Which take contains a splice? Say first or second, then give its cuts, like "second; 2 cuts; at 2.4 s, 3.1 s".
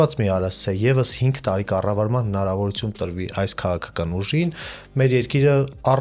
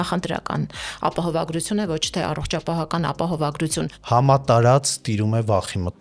second; 1 cut; at 3.9 s